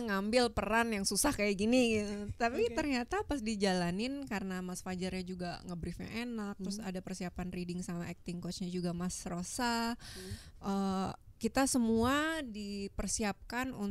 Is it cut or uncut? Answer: uncut